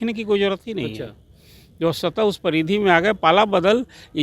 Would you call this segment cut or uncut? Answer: uncut